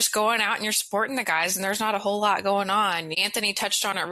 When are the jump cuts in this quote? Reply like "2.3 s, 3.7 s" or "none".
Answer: 3.2 s